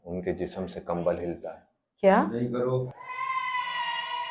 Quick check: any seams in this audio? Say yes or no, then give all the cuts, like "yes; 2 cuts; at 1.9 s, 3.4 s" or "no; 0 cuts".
no; 0 cuts